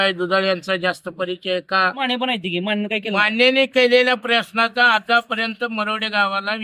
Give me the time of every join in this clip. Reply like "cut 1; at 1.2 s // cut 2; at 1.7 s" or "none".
cut 1; at 2.0 s